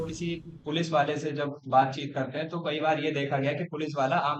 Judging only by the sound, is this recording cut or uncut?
uncut